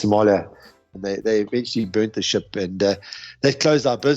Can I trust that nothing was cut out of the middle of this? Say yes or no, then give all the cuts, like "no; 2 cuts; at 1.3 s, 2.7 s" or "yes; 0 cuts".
no; 1 cut; at 0.9 s